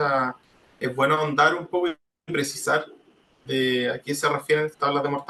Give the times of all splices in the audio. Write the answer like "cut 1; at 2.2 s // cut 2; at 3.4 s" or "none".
none